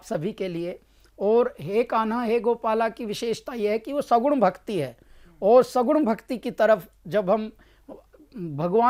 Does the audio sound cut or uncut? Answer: uncut